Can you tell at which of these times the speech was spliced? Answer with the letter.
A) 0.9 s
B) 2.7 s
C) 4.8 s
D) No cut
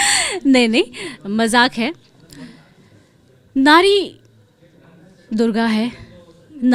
D